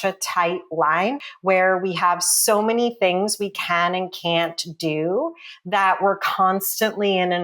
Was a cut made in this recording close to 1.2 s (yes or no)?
yes